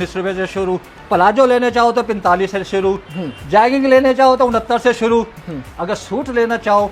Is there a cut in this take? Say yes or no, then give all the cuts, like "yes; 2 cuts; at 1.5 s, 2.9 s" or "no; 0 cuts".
no; 0 cuts